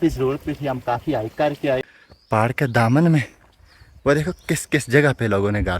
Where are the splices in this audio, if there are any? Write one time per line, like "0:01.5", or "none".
0:01.8

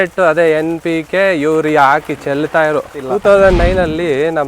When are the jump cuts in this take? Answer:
0:03.0

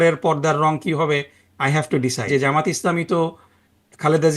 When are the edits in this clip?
0:02.3

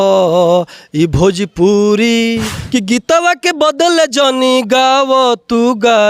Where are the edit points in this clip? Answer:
0:02.6

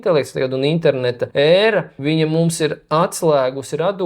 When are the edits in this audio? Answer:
0:01.2
0:01.9

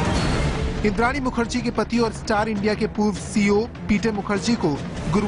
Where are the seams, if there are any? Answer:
0:04.0

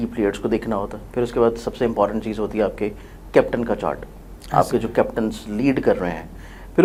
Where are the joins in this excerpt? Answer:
none

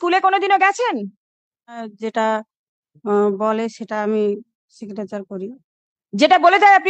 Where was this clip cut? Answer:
0:01.9

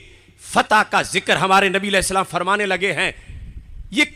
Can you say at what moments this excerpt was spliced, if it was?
none

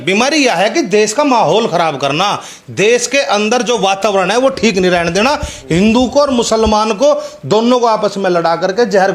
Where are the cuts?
none

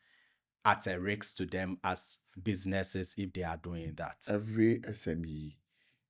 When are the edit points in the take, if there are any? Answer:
0:04.1

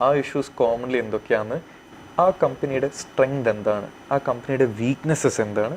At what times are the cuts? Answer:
0:01.8

